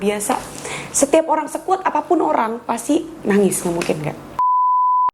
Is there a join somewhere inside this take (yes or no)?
no